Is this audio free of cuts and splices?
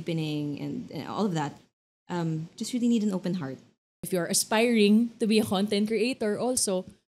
no; 1 cut; at 4.0 s

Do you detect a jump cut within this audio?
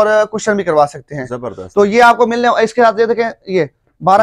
no; 0 cuts

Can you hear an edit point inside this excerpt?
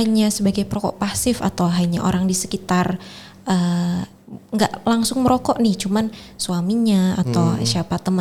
no; 0 cuts

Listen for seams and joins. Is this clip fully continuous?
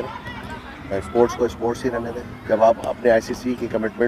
no; 1 cut; at 2.2 s

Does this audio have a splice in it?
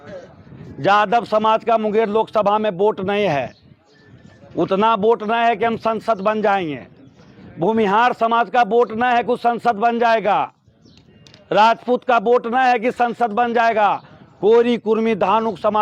no; 0 cuts

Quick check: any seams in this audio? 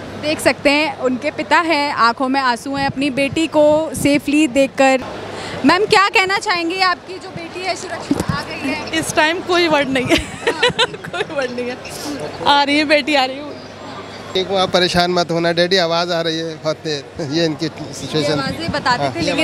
yes; 2 cuts; at 5.1 s, 14.3 s

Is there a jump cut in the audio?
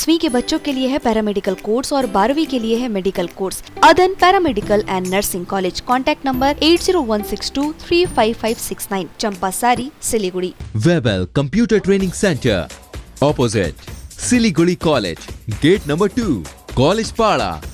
yes; 2 cuts; at 3.7 s, 10.6 s

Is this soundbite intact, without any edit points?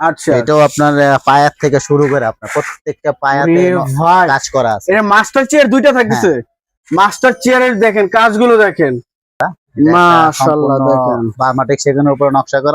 no; 1 cut; at 9.5 s

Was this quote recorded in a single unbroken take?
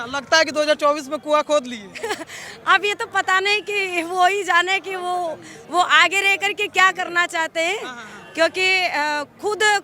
yes; 0 cuts

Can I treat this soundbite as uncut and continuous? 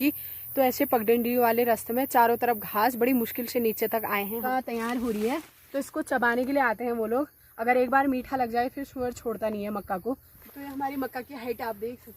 no; 2 cuts; at 4.4 s, 10.3 s

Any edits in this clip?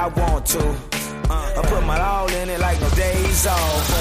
no; 0 cuts

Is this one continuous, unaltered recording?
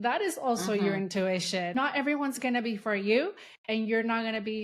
no; 1 cut; at 1.8 s

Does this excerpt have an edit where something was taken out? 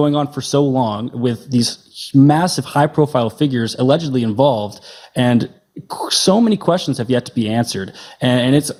no; 0 cuts

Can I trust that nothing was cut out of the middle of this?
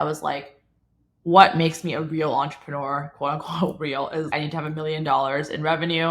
no; 1 cut; at 4.3 s

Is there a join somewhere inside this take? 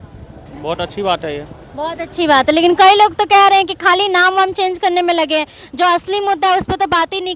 no; 0 cuts

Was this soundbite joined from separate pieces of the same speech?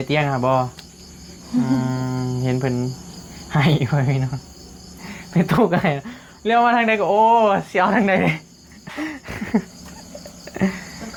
no; 0 cuts

